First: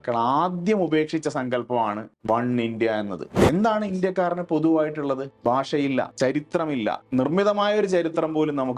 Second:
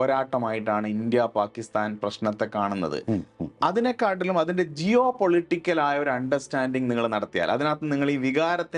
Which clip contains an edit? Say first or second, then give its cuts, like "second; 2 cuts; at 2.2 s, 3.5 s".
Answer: first; 5 cuts; at 2.1 s, 3.3 s, 5.3 s, 6.1 s, 7.0 s